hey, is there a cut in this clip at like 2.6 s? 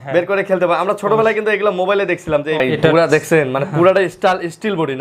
yes; 1 cut; at 2.6 s

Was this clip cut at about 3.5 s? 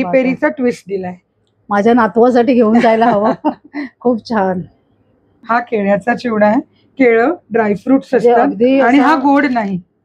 no; 1 cut; at 5.4 s

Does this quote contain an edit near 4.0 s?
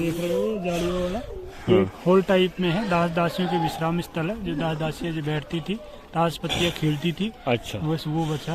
no; 0 cuts

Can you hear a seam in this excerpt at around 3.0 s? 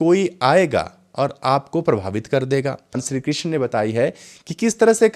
yes; 1 cut; at 3.0 s

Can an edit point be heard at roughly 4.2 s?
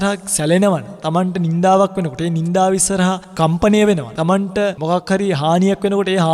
yes; 2 cuts; at 0.9 s, 4.2 s

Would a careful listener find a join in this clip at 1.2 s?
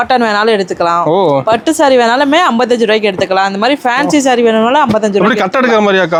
no; 0 cuts

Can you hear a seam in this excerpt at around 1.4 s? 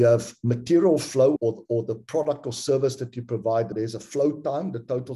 yes; 2 cuts; at 1.4 s, 3.7 s

